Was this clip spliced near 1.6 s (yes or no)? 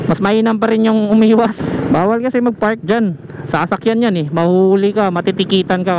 yes